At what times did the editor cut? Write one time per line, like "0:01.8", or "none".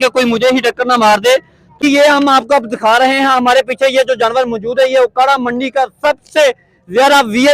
0:01.8